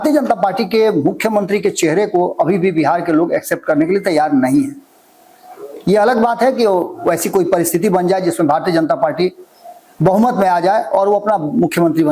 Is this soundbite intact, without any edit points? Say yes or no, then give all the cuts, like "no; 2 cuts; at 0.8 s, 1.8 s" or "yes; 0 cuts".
yes; 0 cuts